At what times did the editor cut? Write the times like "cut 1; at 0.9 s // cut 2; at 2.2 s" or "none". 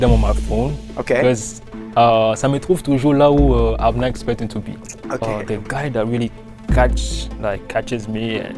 cut 1; at 5.2 s